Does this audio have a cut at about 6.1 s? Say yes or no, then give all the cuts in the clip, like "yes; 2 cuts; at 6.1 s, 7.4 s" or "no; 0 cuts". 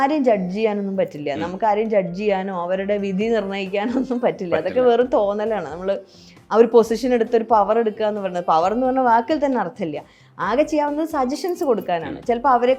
no; 0 cuts